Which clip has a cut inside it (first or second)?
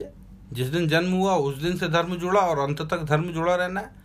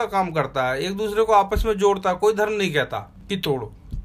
second